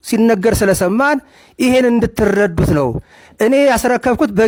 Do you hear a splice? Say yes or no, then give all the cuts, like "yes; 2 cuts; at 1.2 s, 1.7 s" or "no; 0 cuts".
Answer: no; 0 cuts